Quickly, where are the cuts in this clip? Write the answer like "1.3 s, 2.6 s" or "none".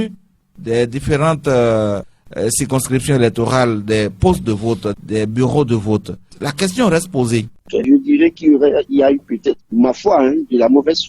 7.8 s